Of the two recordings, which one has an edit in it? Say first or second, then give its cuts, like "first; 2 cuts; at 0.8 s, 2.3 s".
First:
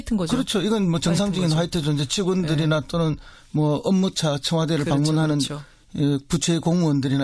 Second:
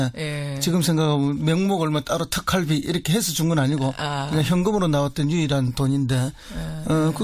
first; 1 cut; at 6.3 s